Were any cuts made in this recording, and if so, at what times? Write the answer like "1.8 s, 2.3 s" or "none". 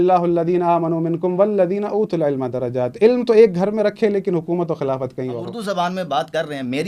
5.5 s

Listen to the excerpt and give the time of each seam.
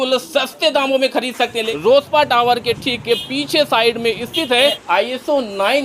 1.6 s, 4.8 s

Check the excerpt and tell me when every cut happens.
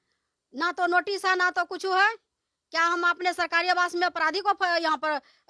none

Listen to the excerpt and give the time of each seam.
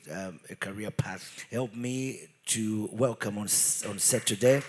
1.3 s

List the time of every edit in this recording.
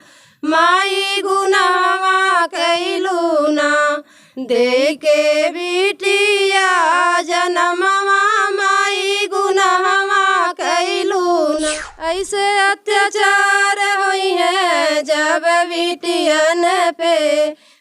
11.7 s

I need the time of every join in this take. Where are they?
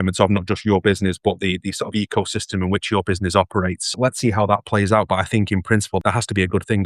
3.9 s, 6.0 s

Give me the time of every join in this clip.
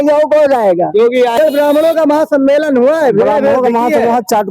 1.3 s

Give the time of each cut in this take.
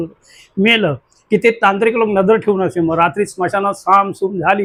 none

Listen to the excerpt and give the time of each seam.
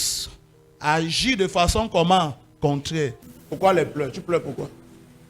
3.3 s

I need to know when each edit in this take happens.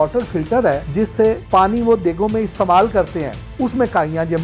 1.2 s

